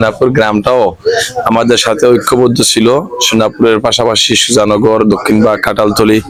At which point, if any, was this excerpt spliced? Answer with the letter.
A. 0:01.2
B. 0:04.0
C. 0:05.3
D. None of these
D